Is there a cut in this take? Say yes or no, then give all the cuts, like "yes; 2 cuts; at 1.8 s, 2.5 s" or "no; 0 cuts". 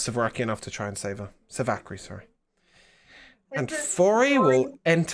no; 0 cuts